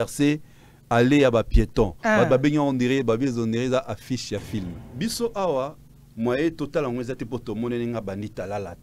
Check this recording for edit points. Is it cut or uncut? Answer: cut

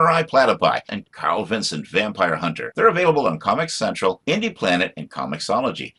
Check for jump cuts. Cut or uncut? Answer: uncut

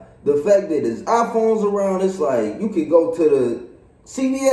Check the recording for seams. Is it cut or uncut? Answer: uncut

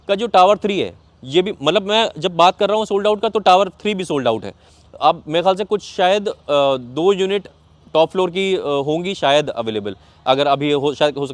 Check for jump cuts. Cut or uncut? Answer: uncut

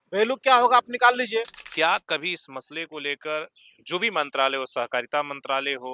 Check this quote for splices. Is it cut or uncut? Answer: cut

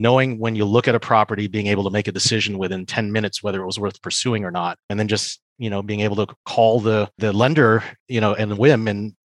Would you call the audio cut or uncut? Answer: cut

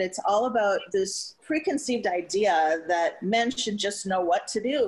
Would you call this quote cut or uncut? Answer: uncut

